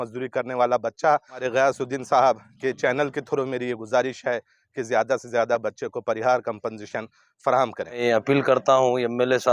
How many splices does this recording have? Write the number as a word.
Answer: two